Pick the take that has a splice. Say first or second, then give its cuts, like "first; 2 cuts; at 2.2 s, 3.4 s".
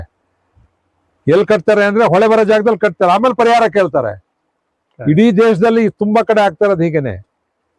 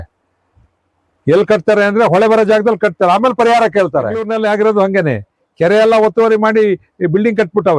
second; 1 cut; at 4.3 s